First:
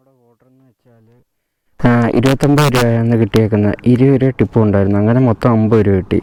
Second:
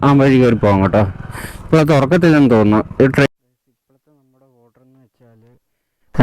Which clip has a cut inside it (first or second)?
second